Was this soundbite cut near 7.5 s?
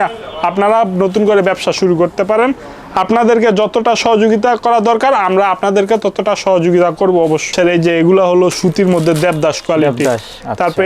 yes; 1 cut; at 7.5 s

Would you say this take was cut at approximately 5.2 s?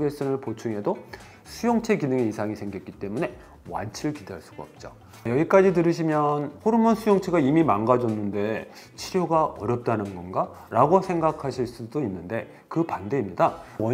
yes; 1 cut; at 5.2 s

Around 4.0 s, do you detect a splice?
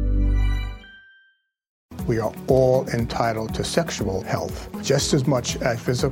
no; 1 cut; at 1.9 s

